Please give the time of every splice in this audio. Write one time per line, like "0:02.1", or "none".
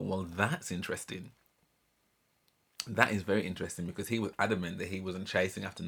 none